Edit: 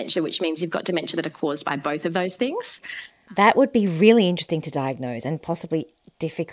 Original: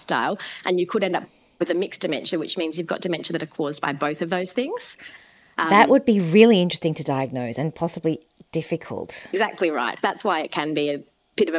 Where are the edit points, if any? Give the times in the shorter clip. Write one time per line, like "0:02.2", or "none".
0:03.4